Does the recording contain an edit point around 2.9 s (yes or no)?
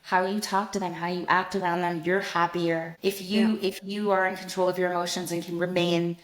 yes